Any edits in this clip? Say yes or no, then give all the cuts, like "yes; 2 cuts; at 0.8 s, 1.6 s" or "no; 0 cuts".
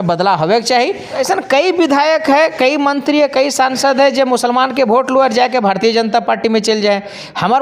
yes; 1 cut; at 1.2 s